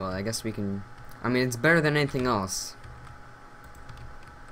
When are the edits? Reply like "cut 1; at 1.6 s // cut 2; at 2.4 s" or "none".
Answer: none